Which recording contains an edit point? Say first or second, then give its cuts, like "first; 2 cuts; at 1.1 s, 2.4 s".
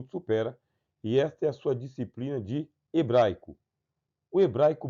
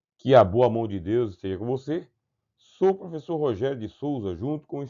second; 1 cut; at 0.9 s